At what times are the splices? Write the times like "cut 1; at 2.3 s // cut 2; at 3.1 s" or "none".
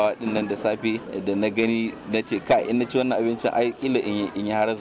none